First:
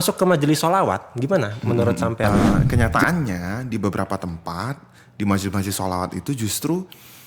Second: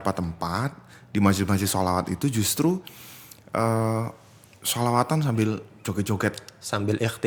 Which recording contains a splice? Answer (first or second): first